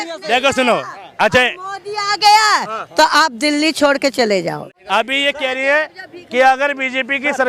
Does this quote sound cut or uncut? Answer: cut